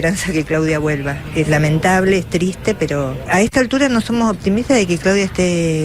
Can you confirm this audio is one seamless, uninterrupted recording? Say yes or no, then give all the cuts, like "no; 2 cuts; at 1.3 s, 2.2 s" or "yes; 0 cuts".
no; 2 cuts; at 1.5 s, 3.2 s